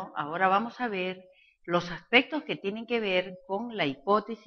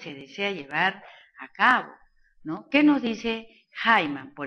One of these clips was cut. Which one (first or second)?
second